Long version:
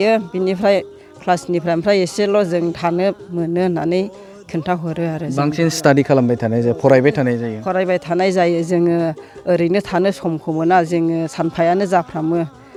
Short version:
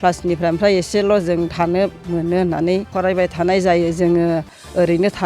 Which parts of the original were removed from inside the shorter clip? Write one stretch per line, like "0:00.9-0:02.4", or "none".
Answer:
0:04.1-0:07.6